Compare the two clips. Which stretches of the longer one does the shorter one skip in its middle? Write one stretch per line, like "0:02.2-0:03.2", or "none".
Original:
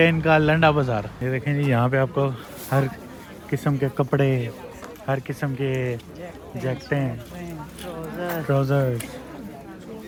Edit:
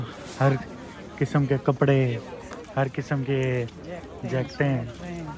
none